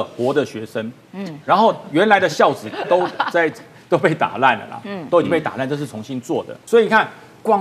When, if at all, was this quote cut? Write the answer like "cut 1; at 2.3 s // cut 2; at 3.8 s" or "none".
cut 1; at 6.5 s